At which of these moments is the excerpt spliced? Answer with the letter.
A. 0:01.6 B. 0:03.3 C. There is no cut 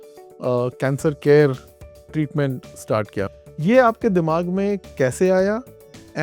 B